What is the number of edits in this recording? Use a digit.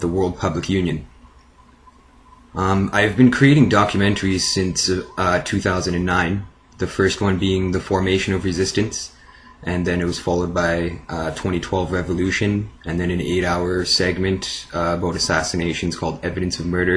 1